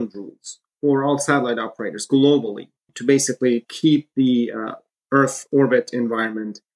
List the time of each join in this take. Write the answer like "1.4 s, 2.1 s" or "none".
none